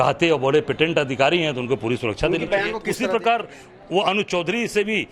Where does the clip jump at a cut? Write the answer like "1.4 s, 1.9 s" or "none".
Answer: 2.8 s